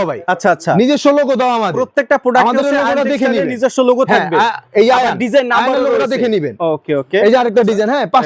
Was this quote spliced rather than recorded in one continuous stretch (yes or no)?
no